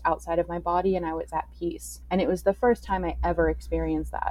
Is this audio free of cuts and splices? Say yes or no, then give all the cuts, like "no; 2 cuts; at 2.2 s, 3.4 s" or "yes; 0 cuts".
no; 1 cut; at 1.9 s